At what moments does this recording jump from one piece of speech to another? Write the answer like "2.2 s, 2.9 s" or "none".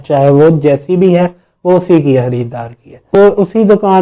3.1 s